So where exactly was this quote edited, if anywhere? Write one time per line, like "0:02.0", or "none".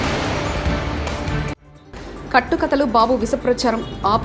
0:01.7